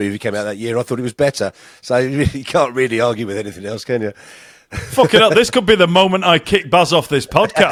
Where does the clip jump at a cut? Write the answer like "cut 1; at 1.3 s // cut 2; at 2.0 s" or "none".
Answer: none